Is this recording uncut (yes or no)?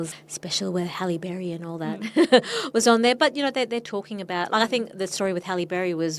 yes